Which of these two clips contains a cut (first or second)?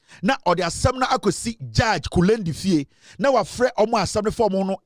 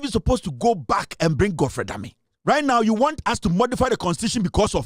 second